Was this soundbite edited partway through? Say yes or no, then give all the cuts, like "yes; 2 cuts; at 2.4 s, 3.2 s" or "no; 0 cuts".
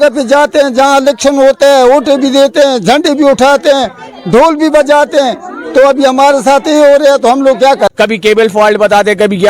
yes; 1 cut; at 7.9 s